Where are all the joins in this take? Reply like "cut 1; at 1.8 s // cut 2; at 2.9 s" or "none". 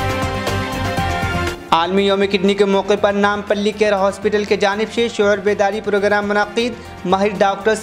cut 1; at 1.5 s